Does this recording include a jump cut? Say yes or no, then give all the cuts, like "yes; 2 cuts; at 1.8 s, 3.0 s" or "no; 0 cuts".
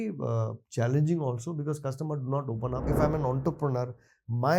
yes; 1 cut; at 2.8 s